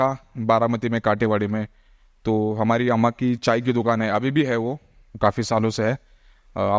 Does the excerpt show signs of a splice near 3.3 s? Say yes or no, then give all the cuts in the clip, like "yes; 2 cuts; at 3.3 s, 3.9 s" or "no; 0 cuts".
no; 0 cuts